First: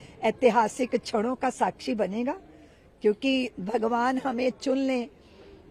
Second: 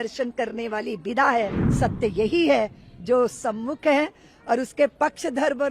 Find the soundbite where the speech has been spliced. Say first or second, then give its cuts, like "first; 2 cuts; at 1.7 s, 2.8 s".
second; 1 cut; at 1.6 s